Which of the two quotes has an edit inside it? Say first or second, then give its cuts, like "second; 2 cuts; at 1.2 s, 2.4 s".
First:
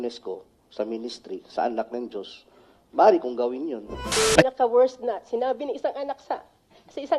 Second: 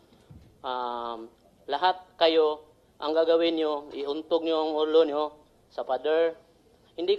first; 1 cut; at 4.2 s